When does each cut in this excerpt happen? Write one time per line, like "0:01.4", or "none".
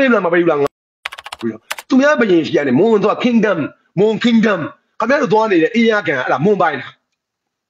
0:01.4

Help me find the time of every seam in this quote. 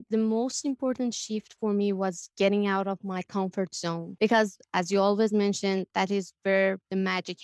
0:04.1

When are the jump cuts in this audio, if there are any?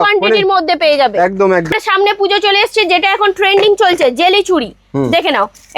0:01.7

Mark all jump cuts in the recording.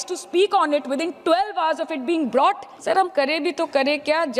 0:02.7

